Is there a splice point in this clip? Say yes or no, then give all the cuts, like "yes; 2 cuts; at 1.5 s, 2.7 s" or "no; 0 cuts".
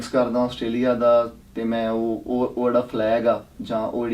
yes; 1 cut; at 1.4 s